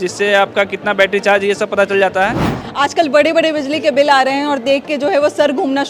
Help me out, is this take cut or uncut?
cut